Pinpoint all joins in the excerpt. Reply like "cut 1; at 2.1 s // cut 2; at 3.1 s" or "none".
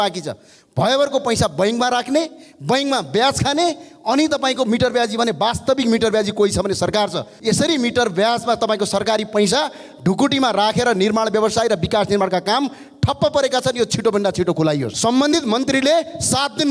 cut 1; at 7.3 s // cut 2; at 14.9 s